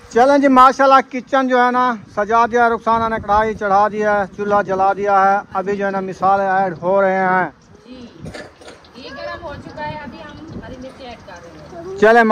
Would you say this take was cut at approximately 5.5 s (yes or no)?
no